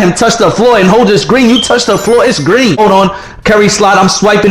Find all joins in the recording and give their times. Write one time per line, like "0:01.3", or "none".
0:02.8